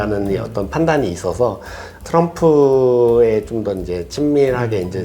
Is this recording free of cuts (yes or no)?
no